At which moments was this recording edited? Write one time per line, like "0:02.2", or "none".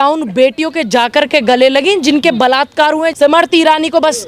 0:03.1